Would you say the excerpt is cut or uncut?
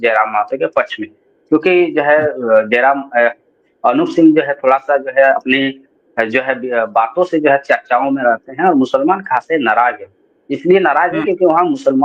uncut